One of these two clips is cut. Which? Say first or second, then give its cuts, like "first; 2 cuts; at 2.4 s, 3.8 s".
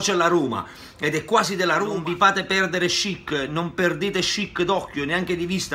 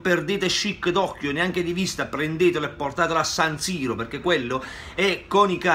first; 1 cut; at 2.0 s